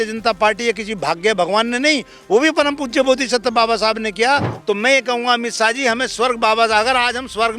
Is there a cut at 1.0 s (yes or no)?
no